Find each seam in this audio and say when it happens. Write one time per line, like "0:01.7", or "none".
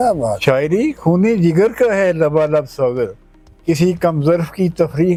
none